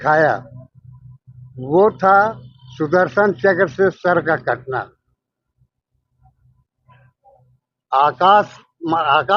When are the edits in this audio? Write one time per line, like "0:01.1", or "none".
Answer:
none